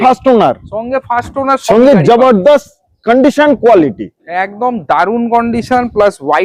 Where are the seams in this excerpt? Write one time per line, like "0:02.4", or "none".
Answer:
none